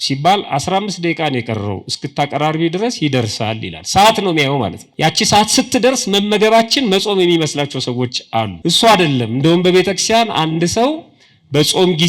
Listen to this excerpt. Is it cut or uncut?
cut